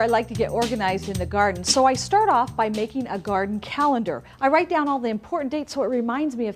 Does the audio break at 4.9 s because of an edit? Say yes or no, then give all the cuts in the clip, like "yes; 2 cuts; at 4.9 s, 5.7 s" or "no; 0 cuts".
yes; 1 cut; at 4.9 s